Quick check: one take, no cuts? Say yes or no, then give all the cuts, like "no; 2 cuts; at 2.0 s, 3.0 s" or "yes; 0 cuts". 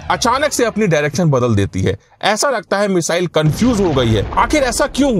no; 1 cut; at 4.3 s